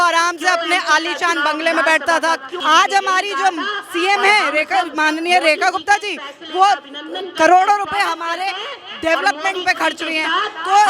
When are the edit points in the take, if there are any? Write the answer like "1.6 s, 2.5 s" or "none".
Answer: 2.5 s